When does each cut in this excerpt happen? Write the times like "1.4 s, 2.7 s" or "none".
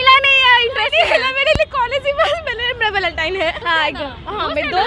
3.6 s